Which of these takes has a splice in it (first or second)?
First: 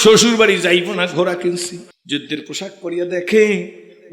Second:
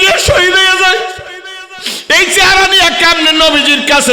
first